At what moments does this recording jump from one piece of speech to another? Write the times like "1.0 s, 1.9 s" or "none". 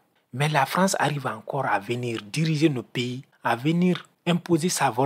3.2 s, 4.1 s